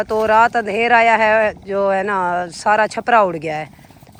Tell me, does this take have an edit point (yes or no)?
no